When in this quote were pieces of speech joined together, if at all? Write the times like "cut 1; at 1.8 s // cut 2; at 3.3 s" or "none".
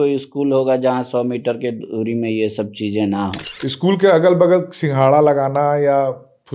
cut 1; at 3.5 s